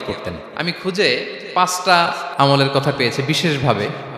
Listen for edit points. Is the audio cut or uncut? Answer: cut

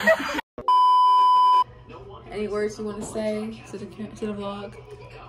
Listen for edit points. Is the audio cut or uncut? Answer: cut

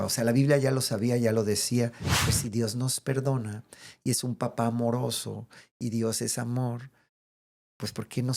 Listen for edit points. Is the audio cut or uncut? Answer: cut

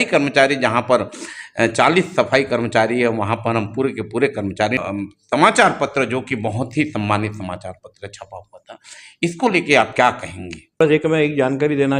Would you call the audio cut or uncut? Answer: cut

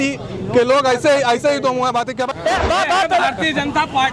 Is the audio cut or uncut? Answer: cut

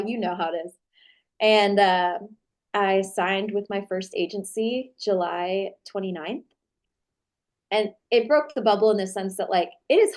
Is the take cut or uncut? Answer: cut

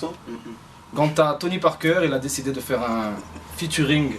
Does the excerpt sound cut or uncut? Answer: cut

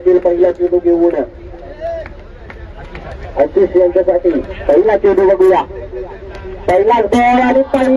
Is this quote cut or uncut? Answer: uncut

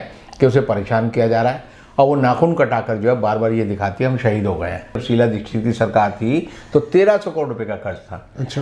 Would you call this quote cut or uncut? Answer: cut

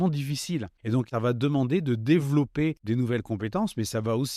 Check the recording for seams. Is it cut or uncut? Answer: cut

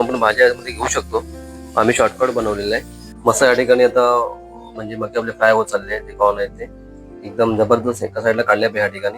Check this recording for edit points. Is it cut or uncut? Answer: cut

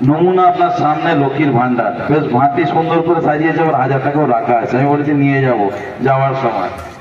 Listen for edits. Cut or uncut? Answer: uncut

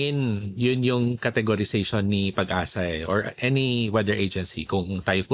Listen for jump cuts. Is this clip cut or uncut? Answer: uncut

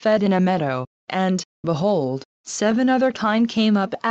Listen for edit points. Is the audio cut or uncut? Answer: uncut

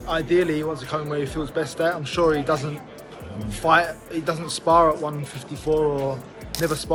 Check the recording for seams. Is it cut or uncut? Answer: uncut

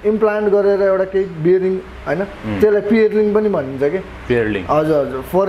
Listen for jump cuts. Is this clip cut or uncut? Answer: uncut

